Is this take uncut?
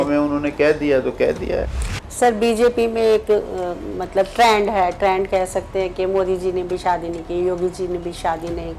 no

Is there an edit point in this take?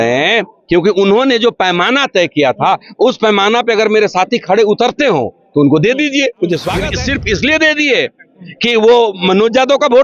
yes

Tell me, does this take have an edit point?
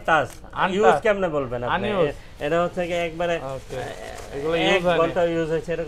no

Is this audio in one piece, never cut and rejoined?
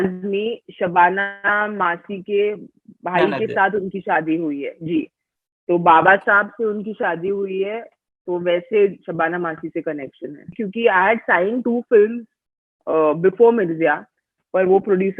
no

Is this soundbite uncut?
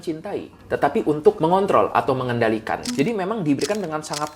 no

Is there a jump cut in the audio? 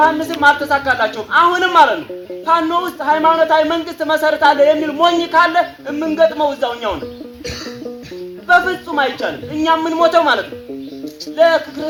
no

